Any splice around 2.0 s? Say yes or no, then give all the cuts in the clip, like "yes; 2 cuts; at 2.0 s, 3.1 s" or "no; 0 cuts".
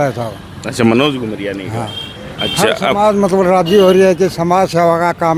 no; 0 cuts